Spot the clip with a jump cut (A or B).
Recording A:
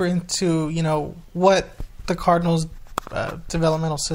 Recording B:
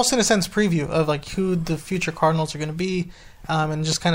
A